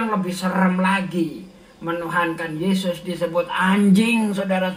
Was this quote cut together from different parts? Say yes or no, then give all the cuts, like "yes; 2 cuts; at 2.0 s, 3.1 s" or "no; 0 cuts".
no; 0 cuts